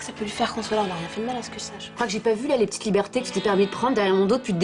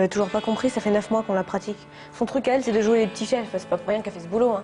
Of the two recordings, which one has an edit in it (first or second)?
first